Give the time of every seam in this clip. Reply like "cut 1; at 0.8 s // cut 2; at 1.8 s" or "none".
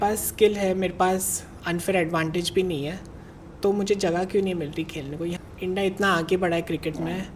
cut 1; at 5.4 s